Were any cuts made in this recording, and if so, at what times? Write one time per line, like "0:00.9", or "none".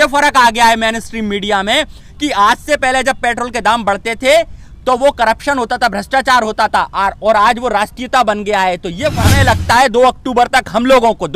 0:09.2